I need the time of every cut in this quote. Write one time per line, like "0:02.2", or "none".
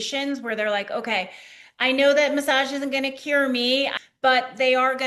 0:04.0